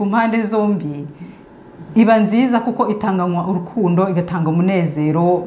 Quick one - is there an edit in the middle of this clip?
no; 0 cuts

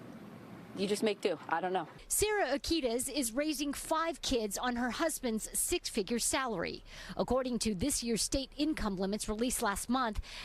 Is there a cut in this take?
yes; 1 cut; at 4.7 s

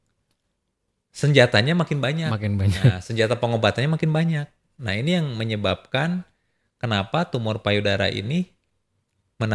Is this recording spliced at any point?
no; 0 cuts

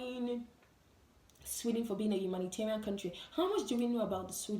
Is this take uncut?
yes; 0 cuts

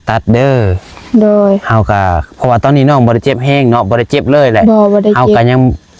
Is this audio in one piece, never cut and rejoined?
yes; 0 cuts

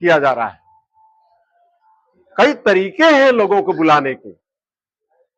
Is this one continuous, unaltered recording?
yes; 0 cuts

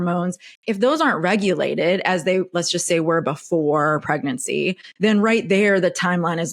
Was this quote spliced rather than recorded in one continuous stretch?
yes; 1 cut; at 4.8 s

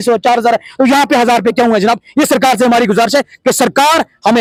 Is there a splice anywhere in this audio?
no; 0 cuts

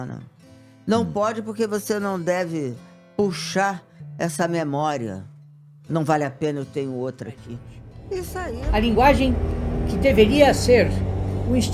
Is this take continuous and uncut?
no; 1 cut; at 8.5 s

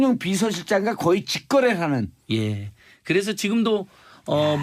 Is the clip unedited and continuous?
no; 1 cut; at 3.7 s

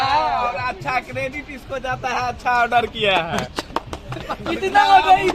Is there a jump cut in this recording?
no; 0 cuts

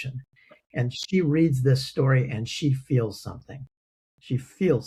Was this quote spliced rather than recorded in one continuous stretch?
no; 0 cuts

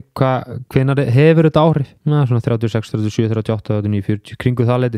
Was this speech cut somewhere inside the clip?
yes; 1 cut; at 1.9 s

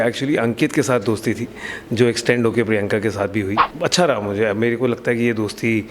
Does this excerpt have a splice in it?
yes; 1 cut; at 3.7 s

